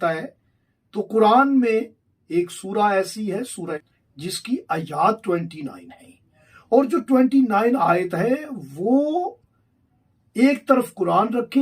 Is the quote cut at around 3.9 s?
yes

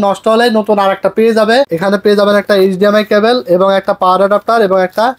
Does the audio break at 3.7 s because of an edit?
no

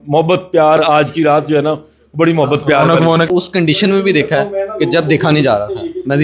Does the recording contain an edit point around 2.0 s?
no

